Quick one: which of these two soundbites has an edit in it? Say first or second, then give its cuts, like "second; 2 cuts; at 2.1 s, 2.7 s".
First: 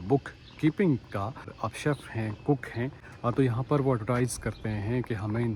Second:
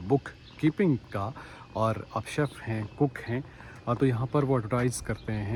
first; 2 cuts; at 1.5 s, 3.1 s